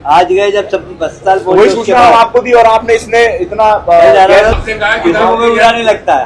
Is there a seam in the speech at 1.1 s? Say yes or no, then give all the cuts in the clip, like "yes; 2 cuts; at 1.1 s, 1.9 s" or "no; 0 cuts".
no; 1 cut; at 4.5 s